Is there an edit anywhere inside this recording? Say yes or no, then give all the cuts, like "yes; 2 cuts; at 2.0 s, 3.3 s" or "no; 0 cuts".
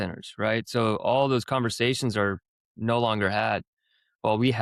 no; 0 cuts